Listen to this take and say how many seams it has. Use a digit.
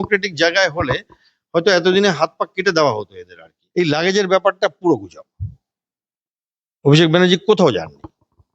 1